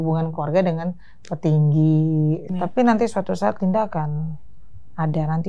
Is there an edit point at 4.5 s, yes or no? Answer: no